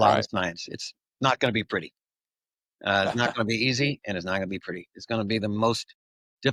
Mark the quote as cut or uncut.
uncut